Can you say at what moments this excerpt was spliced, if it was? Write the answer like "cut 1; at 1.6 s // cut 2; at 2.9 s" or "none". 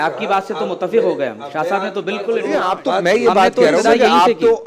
cut 1; at 2.4 s

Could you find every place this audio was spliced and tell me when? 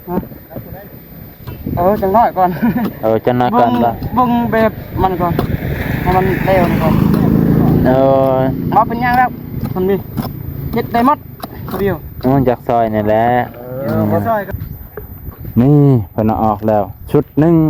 cut 1; at 14.5 s

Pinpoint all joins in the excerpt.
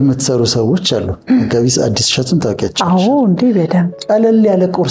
none

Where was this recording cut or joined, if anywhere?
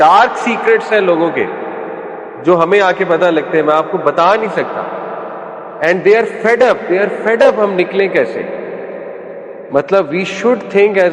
none

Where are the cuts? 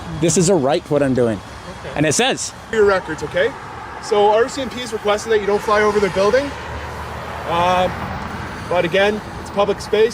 cut 1; at 2.7 s

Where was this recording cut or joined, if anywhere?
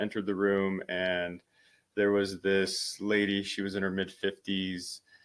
none

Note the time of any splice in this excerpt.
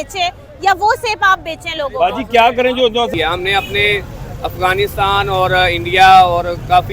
cut 1; at 3.1 s

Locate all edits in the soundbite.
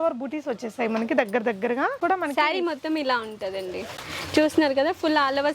cut 1; at 2.0 s

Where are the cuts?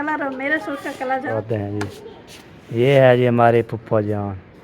cut 1; at 1.3 s

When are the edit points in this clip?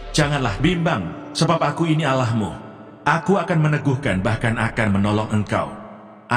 none

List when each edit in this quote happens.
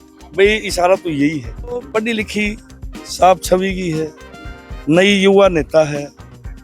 cut 1; at 1.9 s

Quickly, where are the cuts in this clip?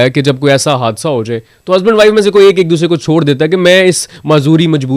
none

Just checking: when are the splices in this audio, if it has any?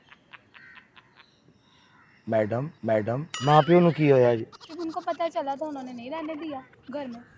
cut 1; at 3.3 s // cut 2; at 4.6 s

